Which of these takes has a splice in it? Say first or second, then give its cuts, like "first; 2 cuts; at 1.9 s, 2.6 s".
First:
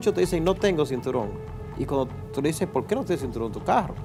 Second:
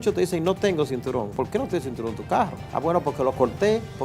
second; 2 cuts; at 1.3 s, 2.6 s